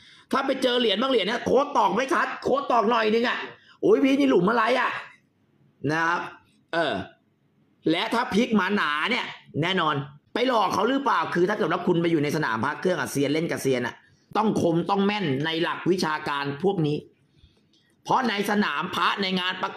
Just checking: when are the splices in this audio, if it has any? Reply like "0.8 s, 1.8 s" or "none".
10.1 s, 14.3 s